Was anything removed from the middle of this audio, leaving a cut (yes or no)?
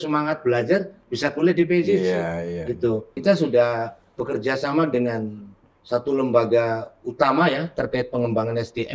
yes